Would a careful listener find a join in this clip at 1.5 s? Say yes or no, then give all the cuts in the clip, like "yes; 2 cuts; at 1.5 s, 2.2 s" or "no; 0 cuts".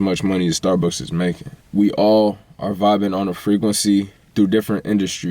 yes; 2 cuts; at 1.5 s, 4.2 s